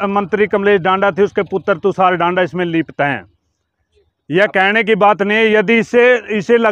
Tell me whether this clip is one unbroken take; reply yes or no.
yes